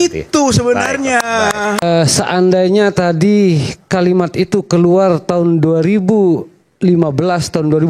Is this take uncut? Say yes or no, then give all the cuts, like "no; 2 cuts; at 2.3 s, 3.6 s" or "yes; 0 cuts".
no; 1 cut; at 1.8 s